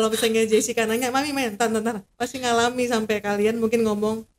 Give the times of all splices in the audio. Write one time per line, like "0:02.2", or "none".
0:02.1

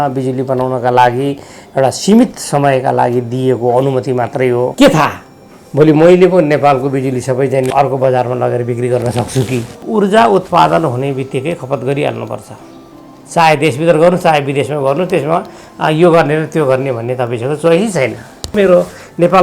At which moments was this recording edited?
0:04.7
0:09.8
0:18.5

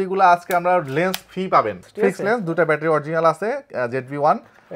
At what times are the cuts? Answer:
0:01.8

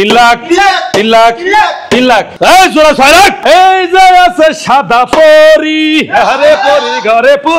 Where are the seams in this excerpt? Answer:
0:02.3
0:03.4

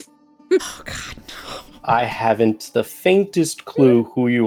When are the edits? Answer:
none

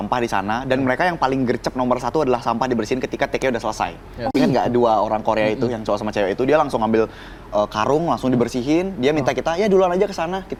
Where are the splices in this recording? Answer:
none

